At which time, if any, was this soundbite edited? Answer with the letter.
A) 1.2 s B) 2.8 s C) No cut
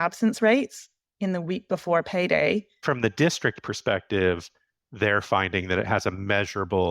B